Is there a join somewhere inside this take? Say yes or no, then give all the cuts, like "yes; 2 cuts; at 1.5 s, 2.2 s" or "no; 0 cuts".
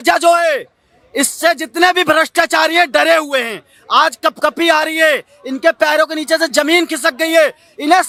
no; 0 cuts